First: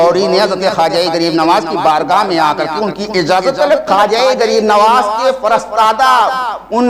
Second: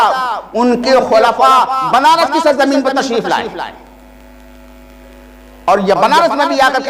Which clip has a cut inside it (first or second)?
first